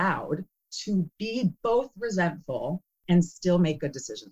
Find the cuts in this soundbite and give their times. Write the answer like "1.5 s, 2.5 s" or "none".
2.9 s